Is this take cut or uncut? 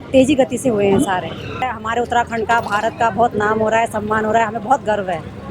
cut